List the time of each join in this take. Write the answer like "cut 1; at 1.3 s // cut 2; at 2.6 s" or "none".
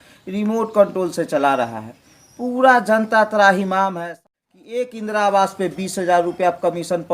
cut 1; at 4.1 s